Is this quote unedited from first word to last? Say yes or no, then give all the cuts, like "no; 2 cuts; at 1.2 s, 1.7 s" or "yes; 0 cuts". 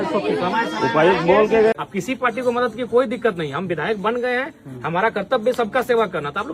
no; 1 cut; at 1.7 s